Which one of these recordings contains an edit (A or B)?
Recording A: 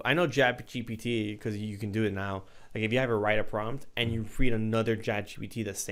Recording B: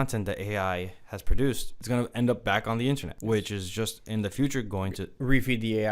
B